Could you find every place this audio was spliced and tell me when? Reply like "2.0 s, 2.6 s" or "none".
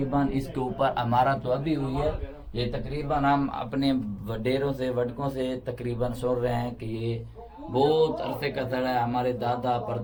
none